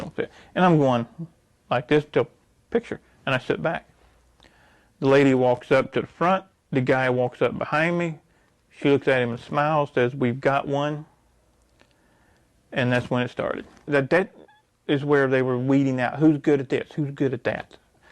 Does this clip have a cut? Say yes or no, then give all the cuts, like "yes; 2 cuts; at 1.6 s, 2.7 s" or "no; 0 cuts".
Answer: yes; 1 cut; at 13.9 s